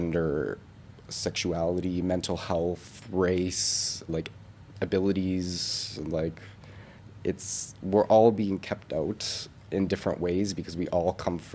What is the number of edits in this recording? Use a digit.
1